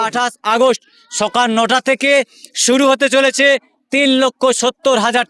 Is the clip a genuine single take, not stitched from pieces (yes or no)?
yes